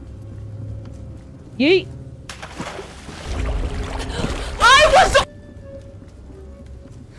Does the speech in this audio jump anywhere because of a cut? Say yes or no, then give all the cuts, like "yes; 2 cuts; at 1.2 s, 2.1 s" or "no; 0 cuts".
no; 0 cuts